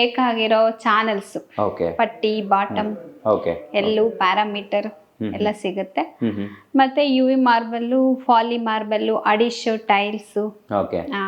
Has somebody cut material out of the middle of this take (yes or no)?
no